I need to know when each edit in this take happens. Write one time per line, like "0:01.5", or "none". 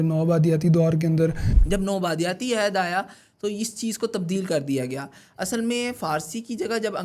0:01.5